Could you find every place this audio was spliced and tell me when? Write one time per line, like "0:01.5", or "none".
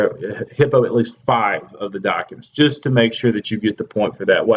0:02.8